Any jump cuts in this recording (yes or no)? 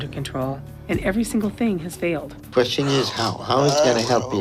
yes